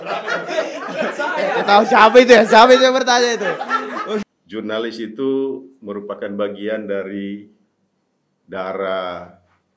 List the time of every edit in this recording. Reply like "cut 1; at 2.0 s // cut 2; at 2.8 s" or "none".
cut 1; at 4.2 s